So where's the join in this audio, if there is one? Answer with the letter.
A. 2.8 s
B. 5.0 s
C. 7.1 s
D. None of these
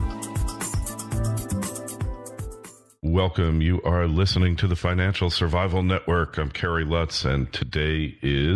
A